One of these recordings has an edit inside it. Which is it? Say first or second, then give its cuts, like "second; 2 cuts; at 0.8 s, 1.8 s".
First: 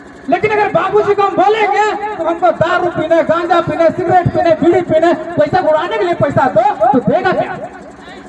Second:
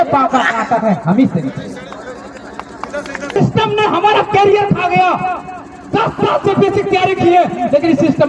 second; 1 cut; at 3.4 s